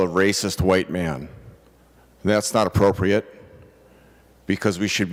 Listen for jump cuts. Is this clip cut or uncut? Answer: uncut